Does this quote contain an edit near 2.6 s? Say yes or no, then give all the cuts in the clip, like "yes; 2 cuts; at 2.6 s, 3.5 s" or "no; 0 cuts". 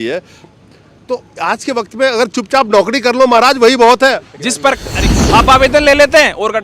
no; 1 cut; at 5.0 s